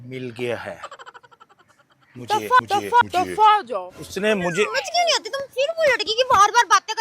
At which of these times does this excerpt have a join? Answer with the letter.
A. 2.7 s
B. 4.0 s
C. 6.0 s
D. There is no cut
B